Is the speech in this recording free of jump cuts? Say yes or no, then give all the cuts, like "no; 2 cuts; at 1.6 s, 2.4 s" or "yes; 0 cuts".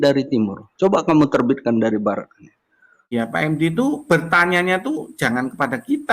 no; 1 cut; at 3.1 s